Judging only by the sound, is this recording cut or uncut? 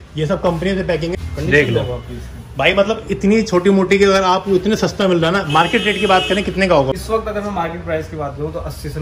cut